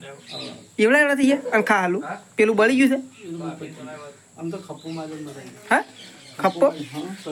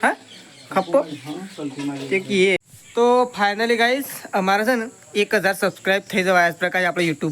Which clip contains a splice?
second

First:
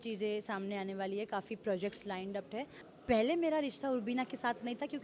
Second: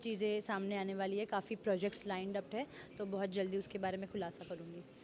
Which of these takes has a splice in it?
first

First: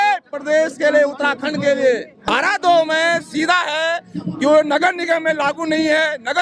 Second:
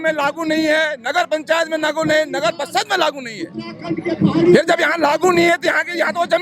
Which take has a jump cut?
first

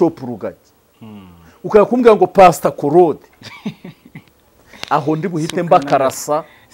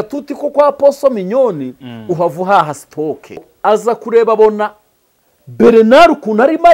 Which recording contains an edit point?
second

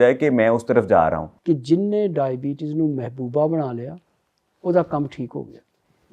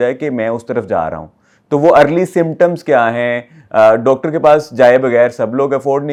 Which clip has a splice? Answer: first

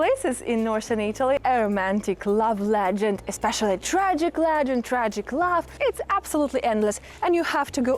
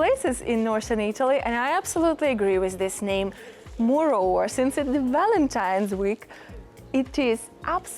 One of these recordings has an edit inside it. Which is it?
first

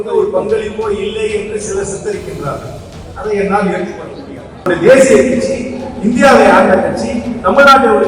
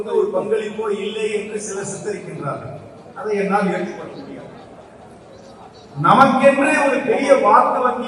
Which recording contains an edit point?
first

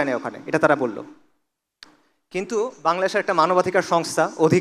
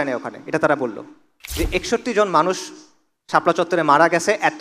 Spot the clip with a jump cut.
second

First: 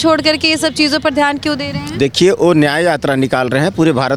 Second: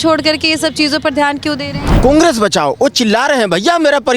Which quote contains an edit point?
second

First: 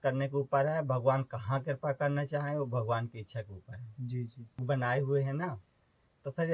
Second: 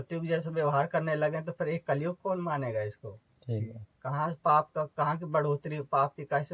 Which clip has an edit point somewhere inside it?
first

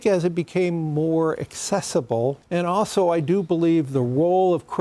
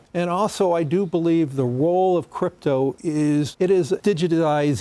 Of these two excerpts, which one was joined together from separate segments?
second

